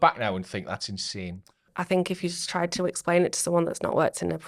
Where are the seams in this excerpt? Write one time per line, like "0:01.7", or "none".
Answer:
0:01.7